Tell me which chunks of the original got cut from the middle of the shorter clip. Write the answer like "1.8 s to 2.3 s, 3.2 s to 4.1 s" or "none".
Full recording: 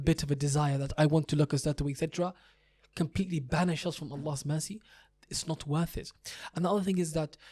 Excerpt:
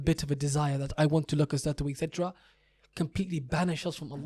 none

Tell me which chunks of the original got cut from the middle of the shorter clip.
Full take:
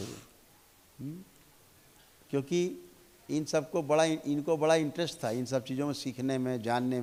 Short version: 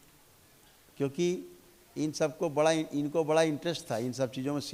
none

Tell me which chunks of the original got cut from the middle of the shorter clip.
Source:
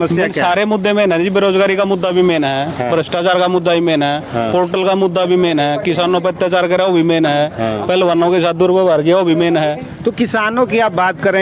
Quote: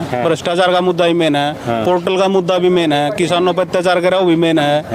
none

